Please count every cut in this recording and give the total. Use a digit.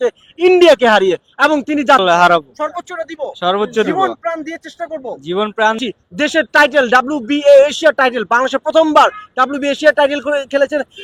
2